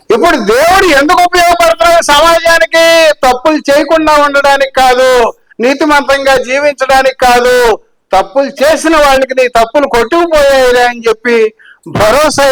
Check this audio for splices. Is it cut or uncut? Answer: uncut